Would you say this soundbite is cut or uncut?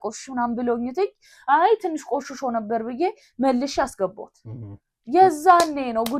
uncut